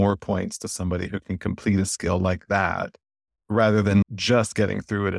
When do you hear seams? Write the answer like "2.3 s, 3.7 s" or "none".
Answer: 4.0 s